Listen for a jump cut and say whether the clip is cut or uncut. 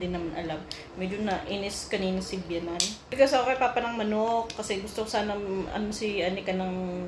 cut